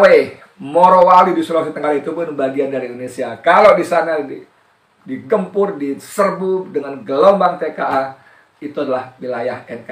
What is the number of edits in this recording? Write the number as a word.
zero